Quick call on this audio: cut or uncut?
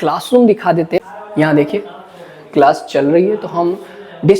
cut